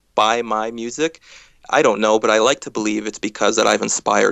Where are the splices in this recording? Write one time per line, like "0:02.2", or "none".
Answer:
none